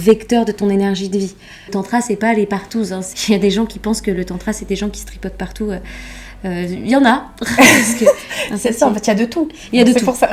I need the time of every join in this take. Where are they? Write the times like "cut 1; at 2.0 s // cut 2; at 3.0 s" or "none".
cut 1; at 1.7 s // cut 2; at 3.1 s

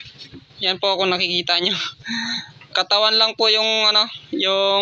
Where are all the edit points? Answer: none

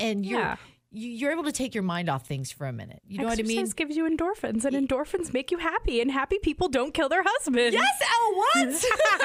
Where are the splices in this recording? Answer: none

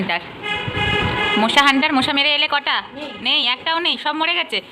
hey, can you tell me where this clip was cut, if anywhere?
none

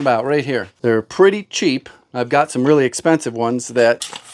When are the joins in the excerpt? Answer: none

